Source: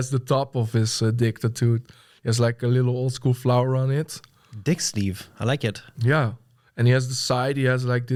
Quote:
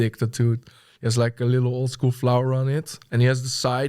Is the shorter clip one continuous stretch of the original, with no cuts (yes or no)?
no